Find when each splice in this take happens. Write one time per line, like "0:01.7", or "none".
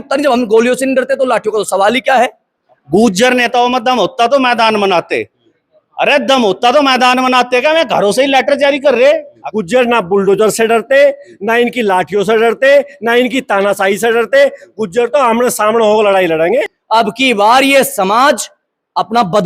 0:02.7
0:09.4
0:16.8